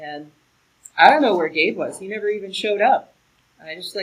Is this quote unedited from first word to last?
yes; 0 cuts

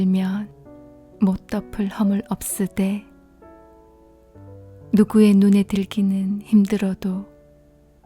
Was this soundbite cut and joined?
yes; 2 cuts; at 3.3 s, 4.9 s

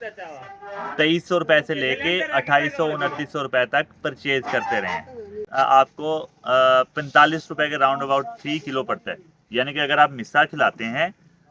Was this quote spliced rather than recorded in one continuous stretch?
yes; 1 cut; at 5.4 s

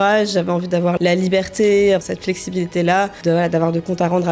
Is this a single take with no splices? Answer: no; 3 cuts; at 1.0 s, 2.0 s, 3.2 s

